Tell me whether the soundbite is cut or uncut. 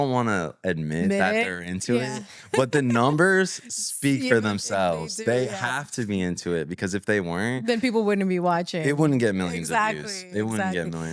uncut